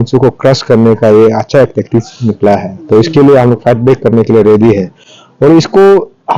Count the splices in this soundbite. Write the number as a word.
zero